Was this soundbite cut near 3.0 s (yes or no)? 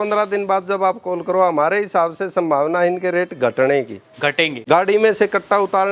no